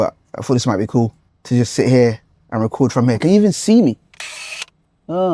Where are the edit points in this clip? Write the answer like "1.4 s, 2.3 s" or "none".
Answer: 1.3 s

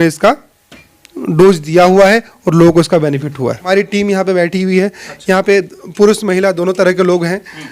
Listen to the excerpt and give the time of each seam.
3.6 s

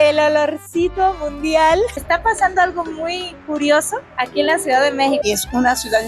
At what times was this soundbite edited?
1.9 s, 5.2 s

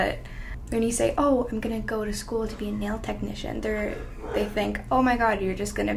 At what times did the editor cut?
none

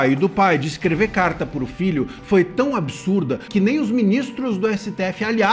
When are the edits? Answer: 3.4 s

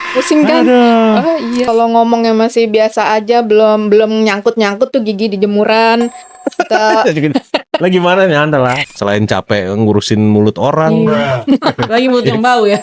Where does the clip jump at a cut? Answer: 1.7 s, 8.8 s

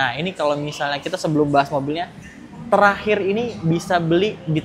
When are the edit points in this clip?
none

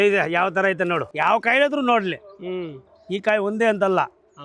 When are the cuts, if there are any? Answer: 1.1 s

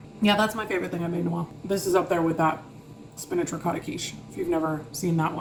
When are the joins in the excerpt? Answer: none

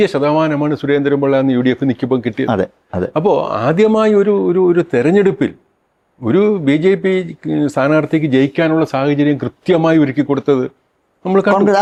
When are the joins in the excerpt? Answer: none

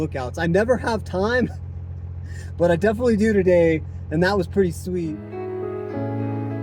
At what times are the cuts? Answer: none

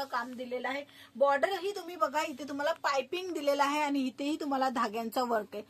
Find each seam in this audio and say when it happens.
none

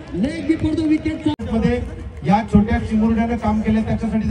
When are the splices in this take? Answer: 1.4 s

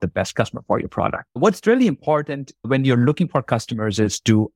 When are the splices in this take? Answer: 1.2 s

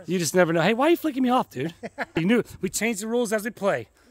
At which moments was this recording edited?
2.2 s

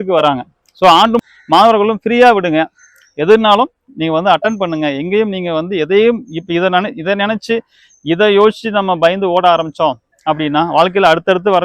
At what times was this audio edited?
1.2 s

